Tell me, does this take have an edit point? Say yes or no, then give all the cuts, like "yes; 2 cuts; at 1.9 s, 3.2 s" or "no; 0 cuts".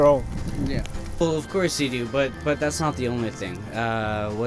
yes; 1 cut; at 1.0 s